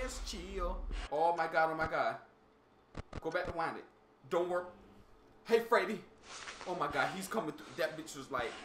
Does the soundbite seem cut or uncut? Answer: cut